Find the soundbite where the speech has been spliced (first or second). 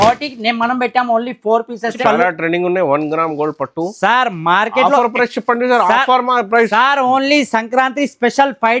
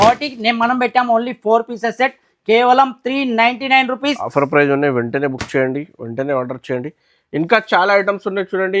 first